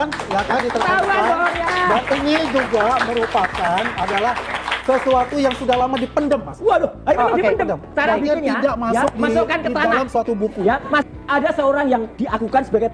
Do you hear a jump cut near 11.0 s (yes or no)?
yes